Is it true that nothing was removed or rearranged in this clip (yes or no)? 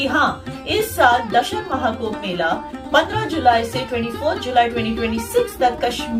yes